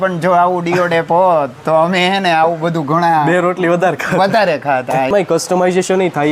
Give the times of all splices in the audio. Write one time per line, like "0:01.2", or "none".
0:05.1